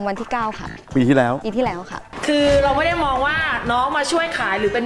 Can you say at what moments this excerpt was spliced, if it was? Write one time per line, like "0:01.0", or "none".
0:02.1